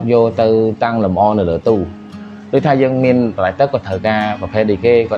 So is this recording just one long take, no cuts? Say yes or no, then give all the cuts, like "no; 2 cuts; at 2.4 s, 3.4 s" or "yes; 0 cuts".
yes; 0 cuts